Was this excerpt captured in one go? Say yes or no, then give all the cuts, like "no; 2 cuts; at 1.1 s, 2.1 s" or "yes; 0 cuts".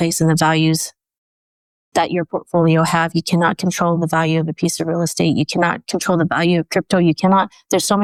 yes; 0 cuts